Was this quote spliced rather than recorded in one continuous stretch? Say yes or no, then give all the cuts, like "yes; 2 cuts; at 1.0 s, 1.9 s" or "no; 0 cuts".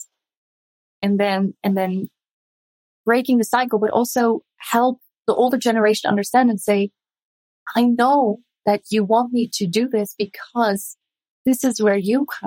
no; 0 cuts